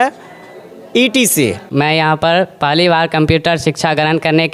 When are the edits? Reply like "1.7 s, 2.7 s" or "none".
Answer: 1.6 s